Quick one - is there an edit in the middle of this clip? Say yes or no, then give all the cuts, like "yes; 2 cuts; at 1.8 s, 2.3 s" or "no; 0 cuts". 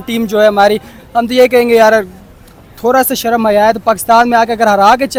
no; 0 cuts